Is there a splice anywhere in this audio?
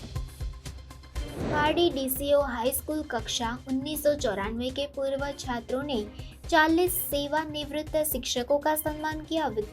no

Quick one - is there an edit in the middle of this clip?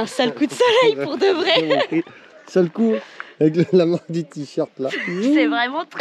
no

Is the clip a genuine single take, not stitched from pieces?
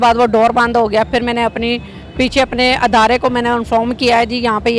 yes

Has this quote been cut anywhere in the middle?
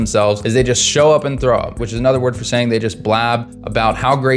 yes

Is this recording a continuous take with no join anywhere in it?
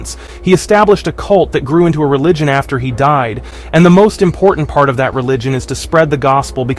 yes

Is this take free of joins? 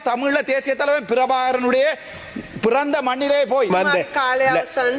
no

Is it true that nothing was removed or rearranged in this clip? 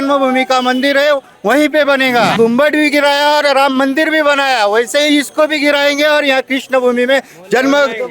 no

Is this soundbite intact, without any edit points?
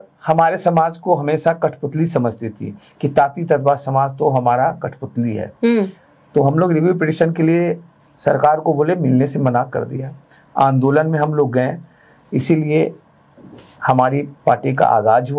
yes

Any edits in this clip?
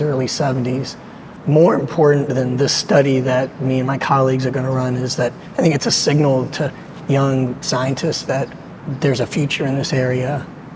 yes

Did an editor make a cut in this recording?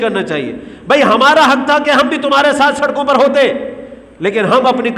no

